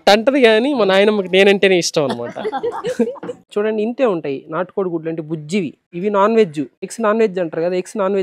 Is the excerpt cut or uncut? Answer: cut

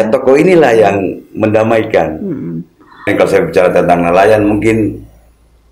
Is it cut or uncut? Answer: cut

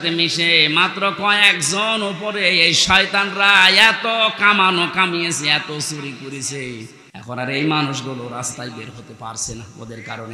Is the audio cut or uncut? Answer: cut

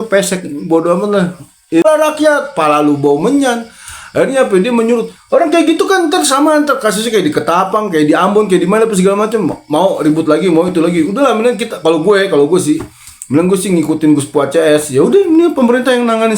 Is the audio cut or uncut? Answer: cut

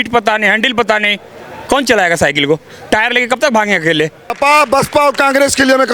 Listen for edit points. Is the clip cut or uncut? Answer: cut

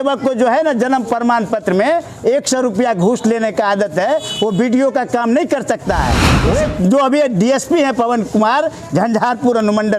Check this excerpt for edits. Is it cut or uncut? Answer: cut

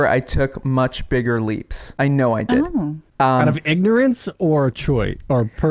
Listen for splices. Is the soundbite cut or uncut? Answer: cut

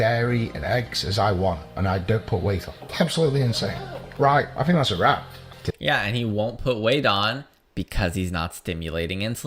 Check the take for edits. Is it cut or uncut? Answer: cut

